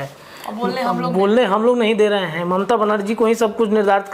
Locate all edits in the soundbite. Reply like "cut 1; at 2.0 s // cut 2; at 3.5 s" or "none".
none